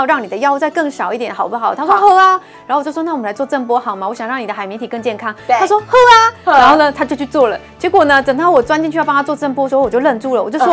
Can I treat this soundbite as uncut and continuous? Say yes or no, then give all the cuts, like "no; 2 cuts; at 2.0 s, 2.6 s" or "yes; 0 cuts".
yes; 0 cuts